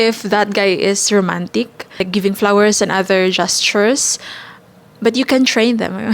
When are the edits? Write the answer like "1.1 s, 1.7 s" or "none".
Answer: 1.9 s